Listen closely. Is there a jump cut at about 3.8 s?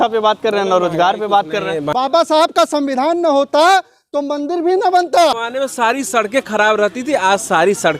no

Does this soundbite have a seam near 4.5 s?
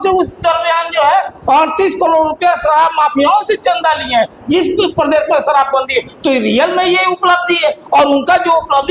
no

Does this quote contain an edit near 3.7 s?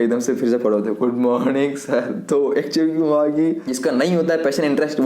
yes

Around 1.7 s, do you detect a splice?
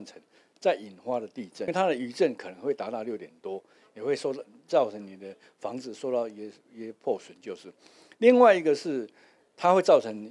yes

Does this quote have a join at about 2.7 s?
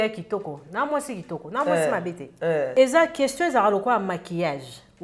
yes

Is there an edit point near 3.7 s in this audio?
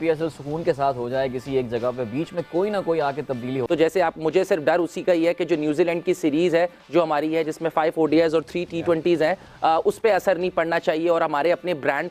yes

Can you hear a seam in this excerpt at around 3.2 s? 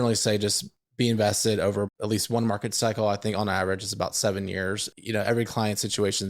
no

